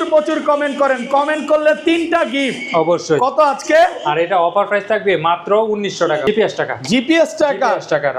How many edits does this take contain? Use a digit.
1